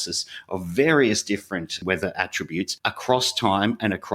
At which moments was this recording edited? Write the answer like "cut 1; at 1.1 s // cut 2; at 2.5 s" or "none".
cut 1; at 1.7 s // cut 2; at 2.7 s